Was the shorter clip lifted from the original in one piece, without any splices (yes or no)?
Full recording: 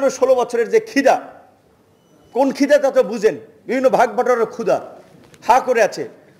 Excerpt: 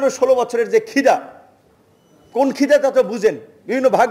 yes